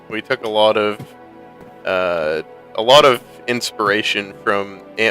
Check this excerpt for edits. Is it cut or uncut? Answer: cut